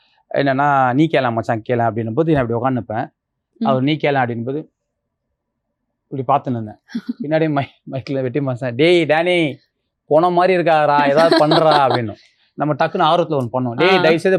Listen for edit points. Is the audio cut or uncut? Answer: uncut